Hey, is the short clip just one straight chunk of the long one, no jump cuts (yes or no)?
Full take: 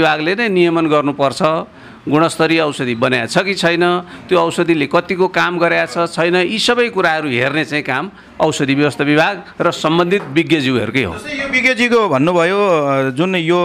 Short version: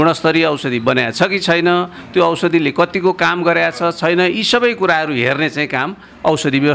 yes